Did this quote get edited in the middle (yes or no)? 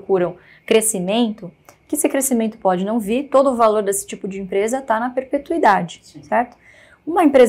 no